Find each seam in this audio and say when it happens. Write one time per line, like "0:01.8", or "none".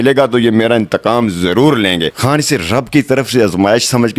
0:02.2